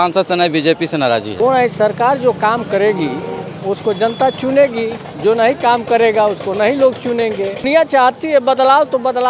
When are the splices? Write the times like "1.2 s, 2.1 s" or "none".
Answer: 1.3 s, 7.7 s